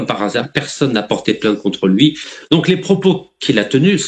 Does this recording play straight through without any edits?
no; 1 cut; at 2.3 s

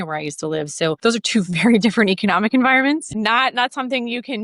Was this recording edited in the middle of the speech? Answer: yes; 1 cut; at 1.0 s

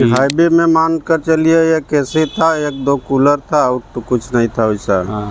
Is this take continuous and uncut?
yes; 0 cuts

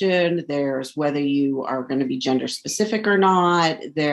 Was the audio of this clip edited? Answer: no; 0 cuts

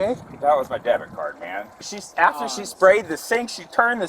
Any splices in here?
yes; 1 cut; at 1.9 s

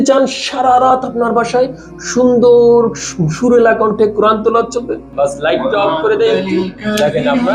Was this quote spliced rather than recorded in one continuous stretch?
yes; 1 cut; at 5.0 s

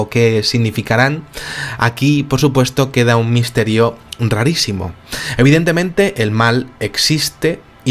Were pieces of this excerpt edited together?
no; 0 cuts

